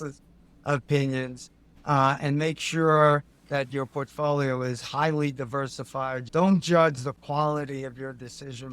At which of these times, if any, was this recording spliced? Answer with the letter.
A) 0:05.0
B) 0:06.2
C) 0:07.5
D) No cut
B